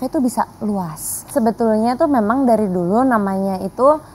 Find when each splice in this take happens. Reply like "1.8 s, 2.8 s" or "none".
1.3 s

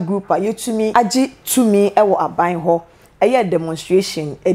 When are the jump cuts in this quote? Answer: 0.9 s

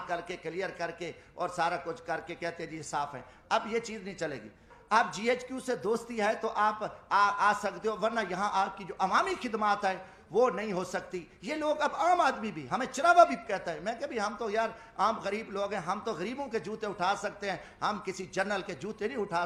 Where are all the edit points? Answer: none

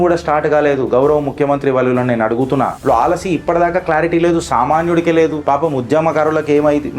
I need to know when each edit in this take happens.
2.8 s

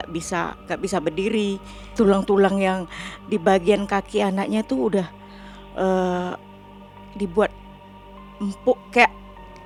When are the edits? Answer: none

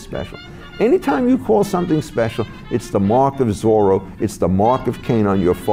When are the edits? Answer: none

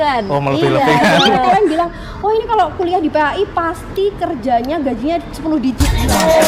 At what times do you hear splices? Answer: none

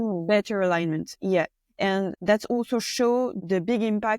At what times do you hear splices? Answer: 2.2 s

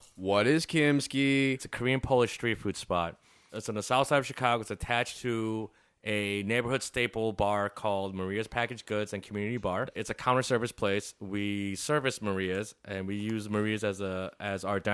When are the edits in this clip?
1.7 s, 10.0 s

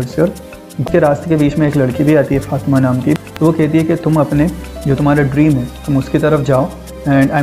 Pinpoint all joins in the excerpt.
0.9 s, 3.3 s

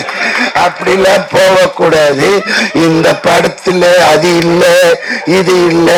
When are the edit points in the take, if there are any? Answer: none

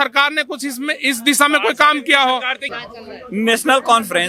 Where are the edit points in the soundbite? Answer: 2.7 s

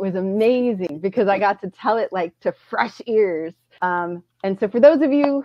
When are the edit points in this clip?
0.9 s, 3.6 s

